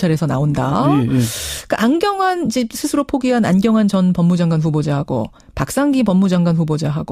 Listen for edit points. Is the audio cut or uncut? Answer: cut